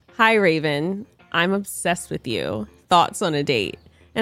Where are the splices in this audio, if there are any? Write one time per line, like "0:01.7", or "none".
0:01.1